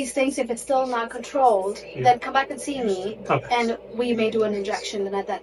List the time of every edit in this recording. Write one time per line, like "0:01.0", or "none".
none